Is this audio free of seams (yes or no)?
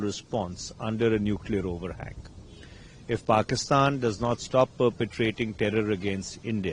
yes